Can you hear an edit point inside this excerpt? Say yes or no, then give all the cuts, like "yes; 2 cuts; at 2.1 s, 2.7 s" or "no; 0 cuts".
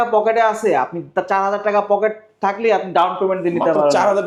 no; 0 cuts